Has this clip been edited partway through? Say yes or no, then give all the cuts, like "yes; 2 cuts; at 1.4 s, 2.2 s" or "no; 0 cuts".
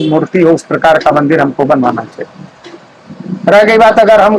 no; 0 cuts